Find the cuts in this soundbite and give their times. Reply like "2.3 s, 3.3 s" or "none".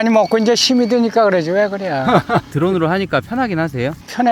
2.5 s